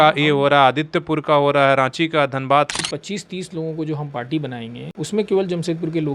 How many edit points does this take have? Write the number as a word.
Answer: two